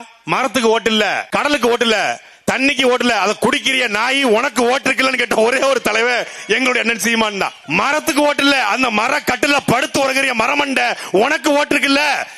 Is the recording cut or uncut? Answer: cut